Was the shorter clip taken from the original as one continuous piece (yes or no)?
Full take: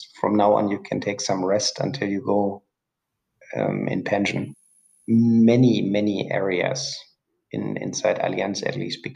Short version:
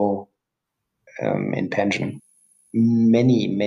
yes